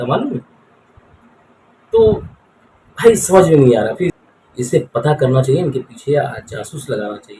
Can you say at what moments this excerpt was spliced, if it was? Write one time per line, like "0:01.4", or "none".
0:04.1